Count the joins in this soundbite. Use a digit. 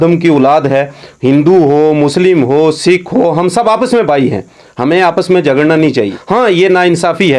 1